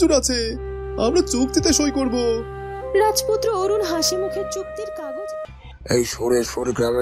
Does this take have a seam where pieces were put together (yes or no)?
yes